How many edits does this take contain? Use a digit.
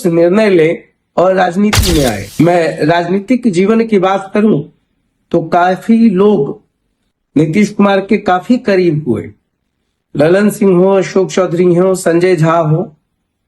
1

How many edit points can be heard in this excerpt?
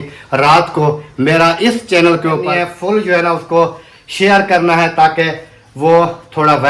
1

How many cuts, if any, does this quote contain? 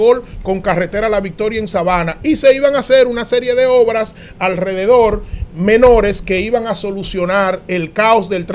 0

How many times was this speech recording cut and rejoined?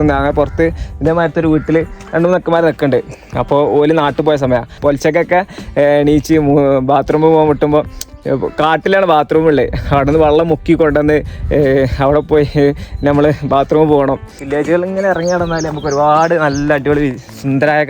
2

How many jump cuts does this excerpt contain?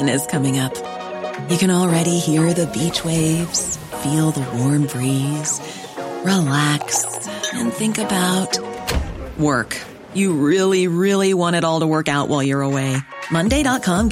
0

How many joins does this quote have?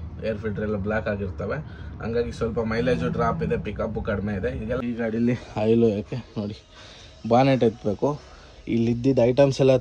1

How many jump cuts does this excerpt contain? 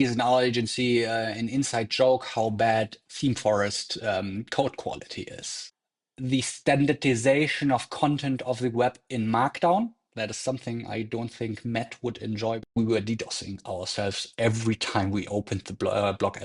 2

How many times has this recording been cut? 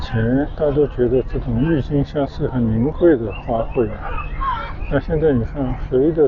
0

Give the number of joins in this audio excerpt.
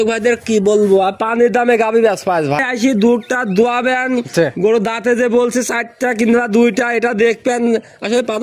1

